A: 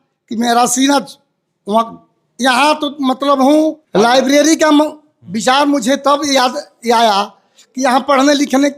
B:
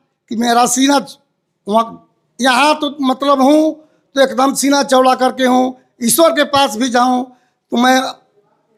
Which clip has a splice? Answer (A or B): A